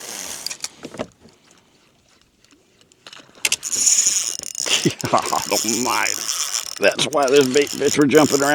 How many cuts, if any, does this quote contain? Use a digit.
1